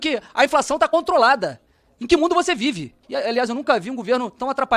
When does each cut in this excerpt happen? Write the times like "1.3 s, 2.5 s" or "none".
3.1 s